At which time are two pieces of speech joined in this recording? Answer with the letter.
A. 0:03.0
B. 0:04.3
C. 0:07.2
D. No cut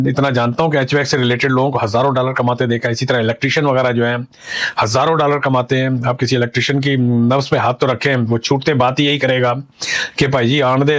D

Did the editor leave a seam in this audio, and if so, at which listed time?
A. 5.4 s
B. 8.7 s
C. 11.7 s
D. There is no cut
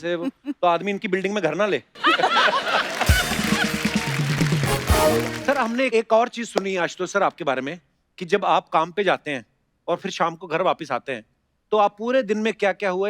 A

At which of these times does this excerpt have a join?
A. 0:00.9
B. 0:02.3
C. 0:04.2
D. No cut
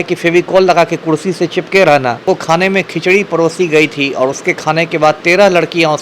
B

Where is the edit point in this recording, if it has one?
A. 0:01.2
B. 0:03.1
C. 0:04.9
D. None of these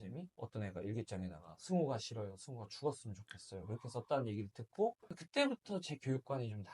D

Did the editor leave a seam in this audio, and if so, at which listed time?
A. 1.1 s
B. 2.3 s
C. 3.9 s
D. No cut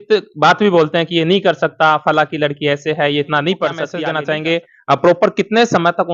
C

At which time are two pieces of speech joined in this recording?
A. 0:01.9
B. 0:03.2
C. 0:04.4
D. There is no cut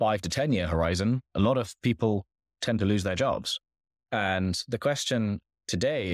D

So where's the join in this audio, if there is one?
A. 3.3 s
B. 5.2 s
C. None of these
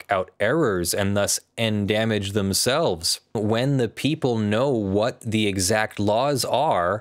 A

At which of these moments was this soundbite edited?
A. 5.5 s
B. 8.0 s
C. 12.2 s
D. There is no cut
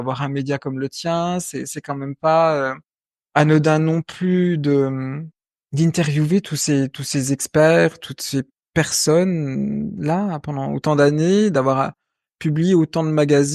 D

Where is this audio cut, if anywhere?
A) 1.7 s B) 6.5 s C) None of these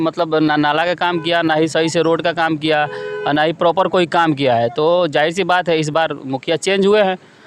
C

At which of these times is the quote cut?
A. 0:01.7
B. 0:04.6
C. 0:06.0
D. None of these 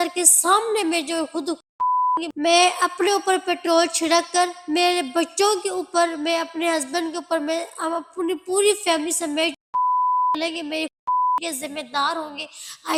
D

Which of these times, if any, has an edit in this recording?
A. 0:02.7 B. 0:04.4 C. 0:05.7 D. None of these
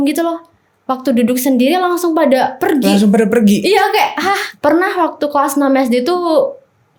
B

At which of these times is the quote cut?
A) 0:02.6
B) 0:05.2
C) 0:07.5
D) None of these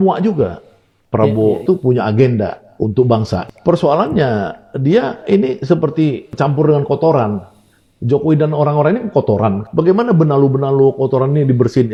D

